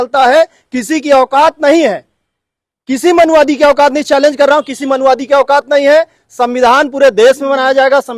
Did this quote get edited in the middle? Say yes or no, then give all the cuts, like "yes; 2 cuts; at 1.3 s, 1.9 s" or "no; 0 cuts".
no; 0 cuts